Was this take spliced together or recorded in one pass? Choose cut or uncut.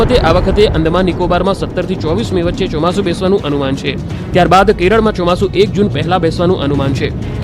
cut